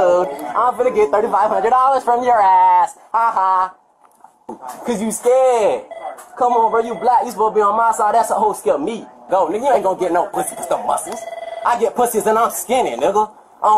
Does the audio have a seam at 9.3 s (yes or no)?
yes